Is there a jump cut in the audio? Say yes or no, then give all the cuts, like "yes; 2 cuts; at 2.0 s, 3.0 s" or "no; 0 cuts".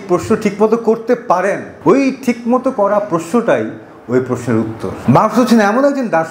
yes; 2 cuts; at 1.7 s, 4.9 s